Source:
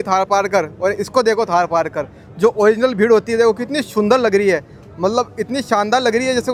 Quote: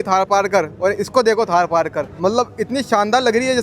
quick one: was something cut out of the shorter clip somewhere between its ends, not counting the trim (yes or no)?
yes